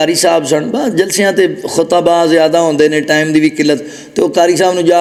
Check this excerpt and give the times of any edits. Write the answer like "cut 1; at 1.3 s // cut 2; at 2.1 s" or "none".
none